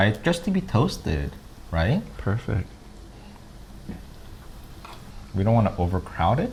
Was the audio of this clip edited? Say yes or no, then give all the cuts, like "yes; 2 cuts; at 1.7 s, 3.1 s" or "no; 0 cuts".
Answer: no; 0 cuts